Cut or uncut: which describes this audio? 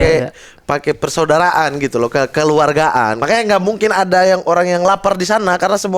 cut